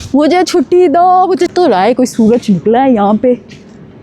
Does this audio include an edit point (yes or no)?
yes